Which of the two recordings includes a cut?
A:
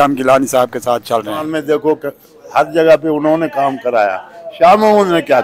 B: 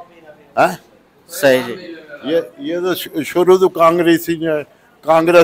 A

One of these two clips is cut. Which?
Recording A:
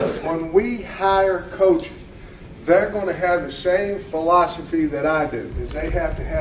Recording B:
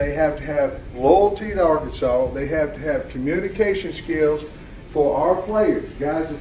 A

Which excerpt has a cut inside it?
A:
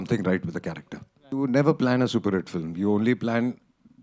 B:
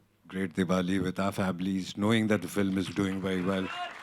A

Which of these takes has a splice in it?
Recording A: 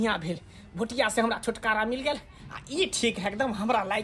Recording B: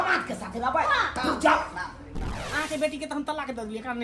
B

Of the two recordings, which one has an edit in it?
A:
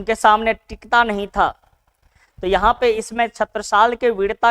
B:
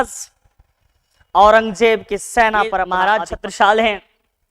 B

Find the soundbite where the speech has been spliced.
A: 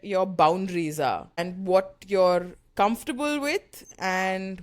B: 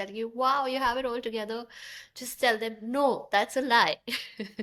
A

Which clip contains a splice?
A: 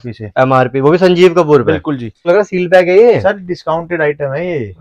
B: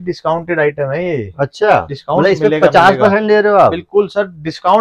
A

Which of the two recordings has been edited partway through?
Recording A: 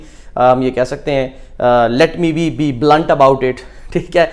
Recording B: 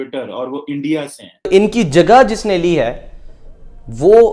B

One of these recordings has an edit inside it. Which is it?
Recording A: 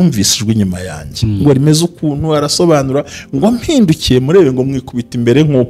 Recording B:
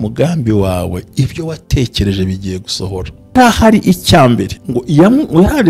B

